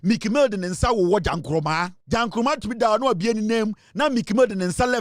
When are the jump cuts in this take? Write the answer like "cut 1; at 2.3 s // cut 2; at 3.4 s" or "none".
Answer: cut 1; at 2.0 s